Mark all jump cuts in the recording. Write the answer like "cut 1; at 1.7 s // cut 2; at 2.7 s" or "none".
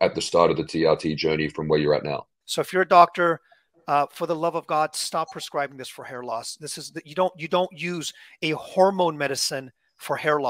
cut 1; at 2.4 s